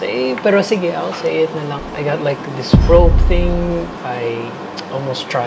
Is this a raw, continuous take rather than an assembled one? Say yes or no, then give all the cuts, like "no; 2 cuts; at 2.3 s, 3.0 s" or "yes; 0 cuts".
no; 2 cuts; at 1.8 s, 3.9 s